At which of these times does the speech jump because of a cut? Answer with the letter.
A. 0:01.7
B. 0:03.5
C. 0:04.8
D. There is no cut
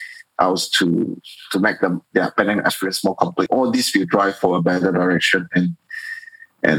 B